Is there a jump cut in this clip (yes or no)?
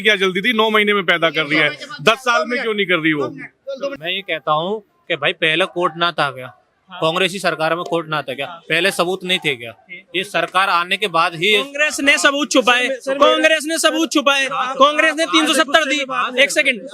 yes